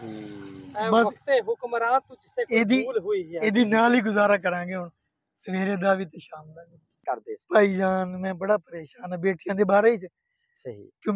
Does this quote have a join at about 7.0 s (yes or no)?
yes